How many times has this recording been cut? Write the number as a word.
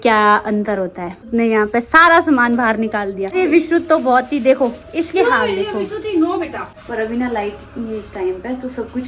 three